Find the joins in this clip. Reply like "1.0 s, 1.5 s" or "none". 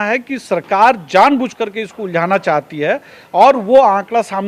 none